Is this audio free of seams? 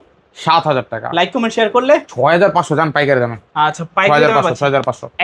yes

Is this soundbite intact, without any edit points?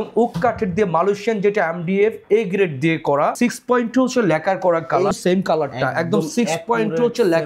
no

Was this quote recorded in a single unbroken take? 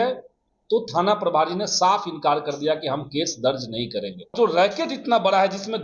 no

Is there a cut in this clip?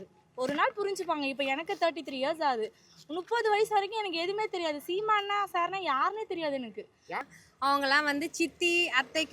yes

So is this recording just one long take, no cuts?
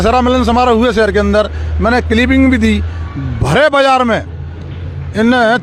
yes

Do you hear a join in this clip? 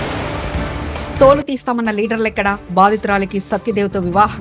yes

